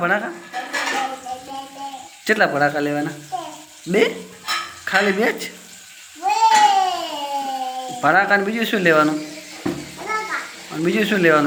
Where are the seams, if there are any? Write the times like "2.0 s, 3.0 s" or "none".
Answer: none